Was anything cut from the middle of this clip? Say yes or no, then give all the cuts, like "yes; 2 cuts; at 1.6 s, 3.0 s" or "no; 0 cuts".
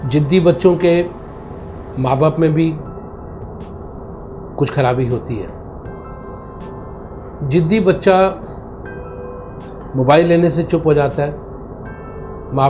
no; 0 cuts